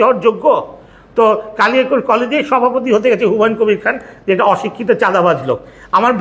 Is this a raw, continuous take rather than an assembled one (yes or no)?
yes